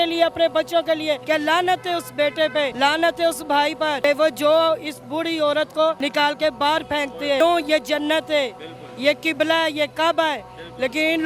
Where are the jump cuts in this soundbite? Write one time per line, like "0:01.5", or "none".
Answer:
0:01.2
0:02.7
0:04.0
0:06.0
0:07.4